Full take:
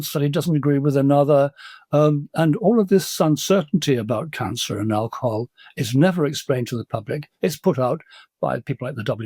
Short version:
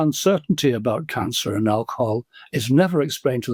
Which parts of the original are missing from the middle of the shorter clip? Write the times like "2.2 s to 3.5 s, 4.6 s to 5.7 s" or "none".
none